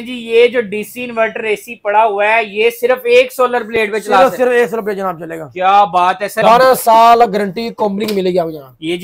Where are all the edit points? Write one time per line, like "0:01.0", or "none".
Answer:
0:06.4